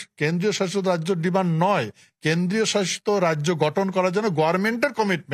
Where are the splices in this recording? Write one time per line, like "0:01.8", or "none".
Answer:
none